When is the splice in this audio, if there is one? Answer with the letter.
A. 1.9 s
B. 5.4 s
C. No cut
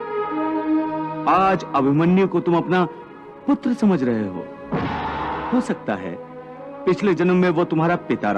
B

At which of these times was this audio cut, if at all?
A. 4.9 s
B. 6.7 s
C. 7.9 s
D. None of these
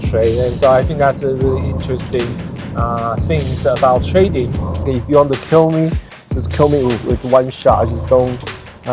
A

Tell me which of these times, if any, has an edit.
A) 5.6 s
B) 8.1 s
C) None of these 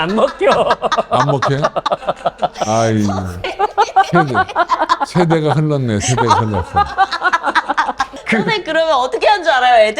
B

